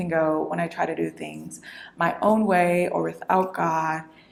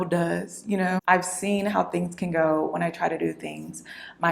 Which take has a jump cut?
second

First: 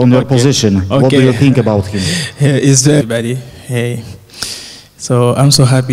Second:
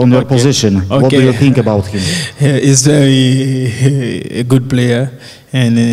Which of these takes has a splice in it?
second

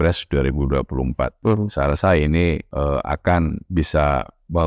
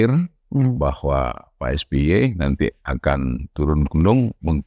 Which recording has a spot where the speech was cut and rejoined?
first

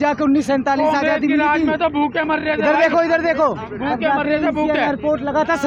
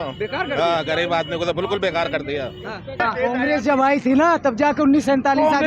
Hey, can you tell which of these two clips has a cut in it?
second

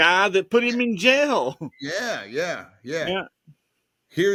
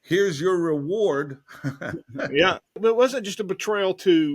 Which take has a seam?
second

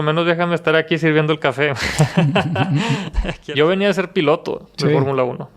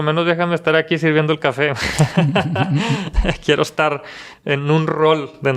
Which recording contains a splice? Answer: first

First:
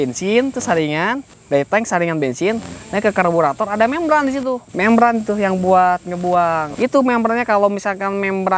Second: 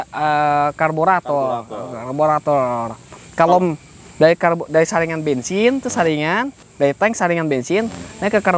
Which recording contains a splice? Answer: first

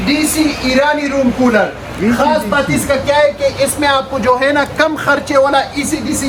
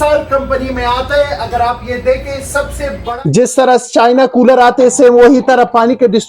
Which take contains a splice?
second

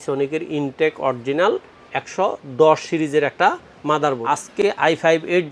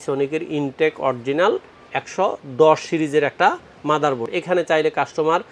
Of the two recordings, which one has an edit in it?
first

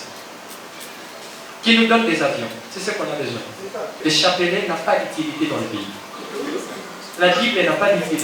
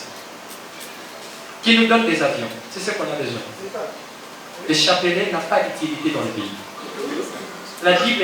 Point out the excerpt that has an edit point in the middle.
first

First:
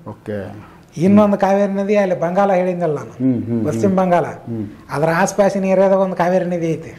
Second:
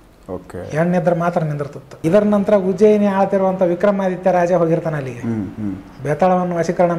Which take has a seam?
second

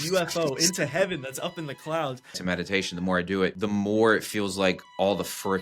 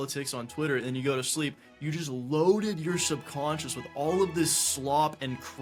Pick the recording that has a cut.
first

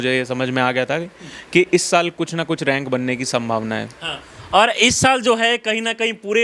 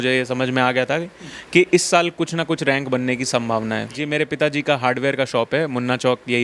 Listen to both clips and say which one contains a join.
second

